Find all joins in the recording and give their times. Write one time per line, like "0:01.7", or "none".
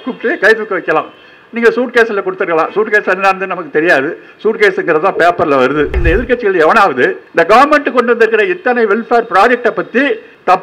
0:06.0
0:07.2